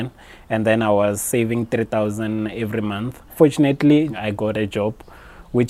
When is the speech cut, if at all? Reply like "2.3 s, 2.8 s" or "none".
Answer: 3.3 s, 4.1 s